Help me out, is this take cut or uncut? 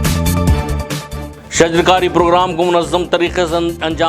cut